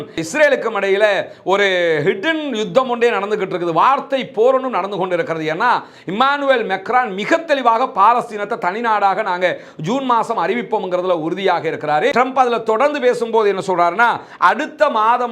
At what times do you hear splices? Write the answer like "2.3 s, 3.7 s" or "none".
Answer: 12.1 s